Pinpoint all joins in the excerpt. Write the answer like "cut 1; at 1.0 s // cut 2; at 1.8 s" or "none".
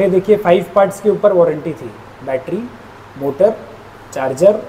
none